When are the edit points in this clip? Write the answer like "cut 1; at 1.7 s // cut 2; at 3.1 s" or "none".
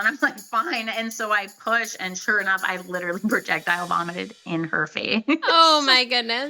cut 1; at 5.5 s